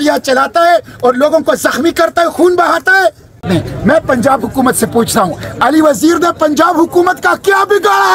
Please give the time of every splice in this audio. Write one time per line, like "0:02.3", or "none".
0:03.4